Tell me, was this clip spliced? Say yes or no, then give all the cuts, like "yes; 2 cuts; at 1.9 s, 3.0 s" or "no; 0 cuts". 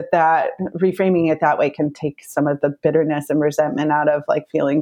no; 0 cuts